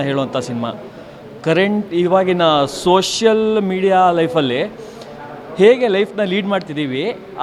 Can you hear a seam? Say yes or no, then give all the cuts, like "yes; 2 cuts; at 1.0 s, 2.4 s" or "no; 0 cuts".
no; 0 cuts